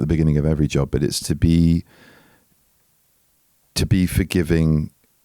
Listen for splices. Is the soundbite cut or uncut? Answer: uncut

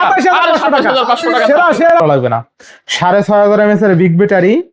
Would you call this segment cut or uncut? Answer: cut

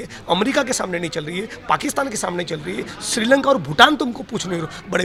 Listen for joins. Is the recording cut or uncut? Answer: uncut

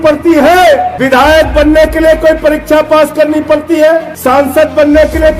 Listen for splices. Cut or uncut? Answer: cut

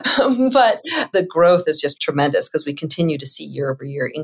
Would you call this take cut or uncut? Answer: cut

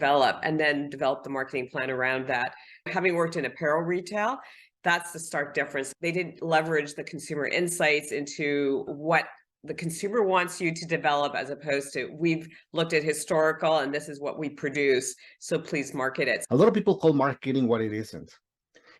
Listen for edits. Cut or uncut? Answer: cut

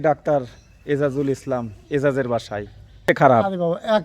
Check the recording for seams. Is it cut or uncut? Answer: cut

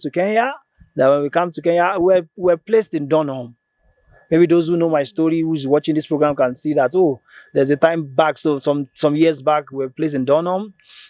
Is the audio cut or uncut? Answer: uncut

